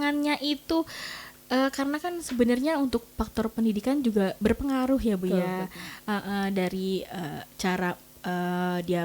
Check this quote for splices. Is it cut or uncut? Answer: uncut